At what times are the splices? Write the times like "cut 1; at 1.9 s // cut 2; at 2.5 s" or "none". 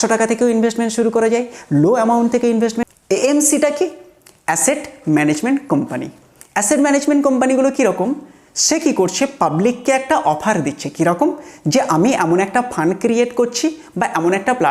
cut 1; at 2.8 s